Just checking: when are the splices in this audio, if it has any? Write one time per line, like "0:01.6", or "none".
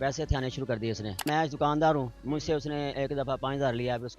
0:01.2